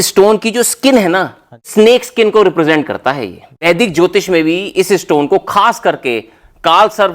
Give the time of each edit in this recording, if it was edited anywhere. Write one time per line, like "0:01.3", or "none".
0:01.7
0:03.7

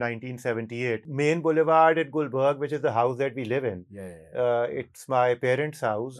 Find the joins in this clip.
0:01.0

